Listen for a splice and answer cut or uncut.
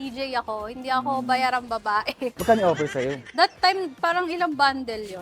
cut